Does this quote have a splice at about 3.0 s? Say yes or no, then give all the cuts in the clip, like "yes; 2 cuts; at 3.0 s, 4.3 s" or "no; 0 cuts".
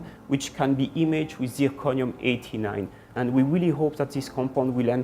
yes; 1 cut; at 3.0 s